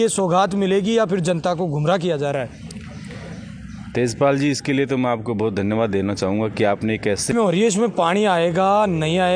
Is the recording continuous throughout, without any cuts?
no; 1 cut; at 7.3 s

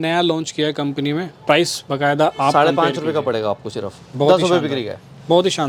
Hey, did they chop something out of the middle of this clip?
no; 0 cuts

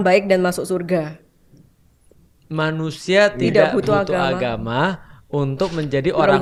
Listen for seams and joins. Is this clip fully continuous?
yes; 0 cuts

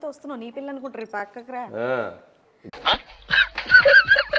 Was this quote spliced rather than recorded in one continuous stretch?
no; 0 cuts

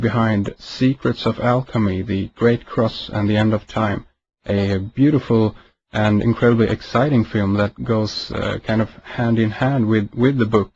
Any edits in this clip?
yes; 1 cut; at 7.9 s

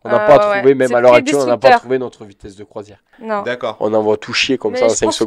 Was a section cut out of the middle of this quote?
no; 0 cuts

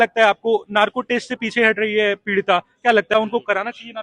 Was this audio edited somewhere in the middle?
yes; 1 cut; at 3.1 s

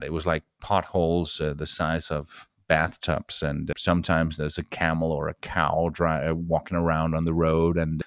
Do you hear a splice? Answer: no; 0 cuts

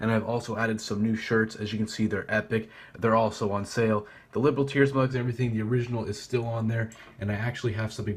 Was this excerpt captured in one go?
yes; 0 cuts

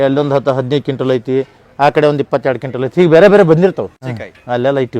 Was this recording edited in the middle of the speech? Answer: yes; 1 cut; at 4.0 s

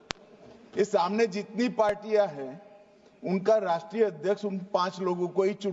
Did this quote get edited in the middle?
no; 0 cuts

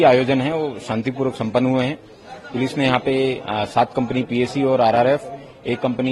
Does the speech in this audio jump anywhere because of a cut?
no; 0 cuts

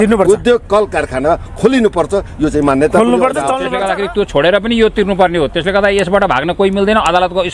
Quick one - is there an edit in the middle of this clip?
yes; 1 cut; at 3.7 s

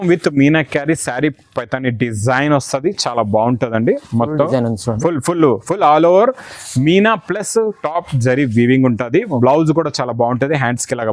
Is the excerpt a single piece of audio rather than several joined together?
yes; 0 cuts

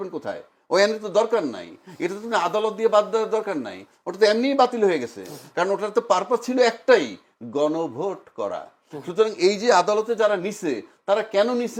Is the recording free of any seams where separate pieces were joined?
yes; 0 cuts

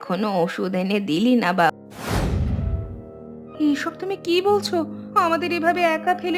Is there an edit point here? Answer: yes; 1 cut; at 1.7 s

